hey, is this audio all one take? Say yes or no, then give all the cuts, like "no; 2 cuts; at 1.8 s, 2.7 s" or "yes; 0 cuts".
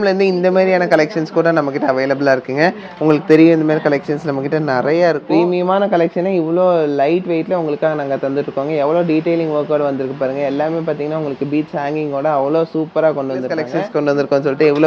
no; 2 cuts; at 5.2 s, 13.7 s